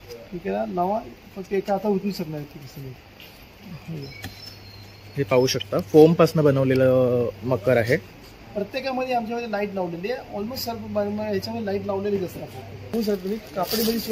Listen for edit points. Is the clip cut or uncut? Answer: cut